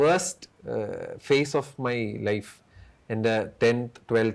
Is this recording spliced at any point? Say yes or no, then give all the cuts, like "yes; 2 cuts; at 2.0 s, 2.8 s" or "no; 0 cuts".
no; 0 cuts